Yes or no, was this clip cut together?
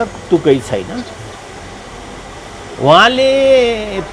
no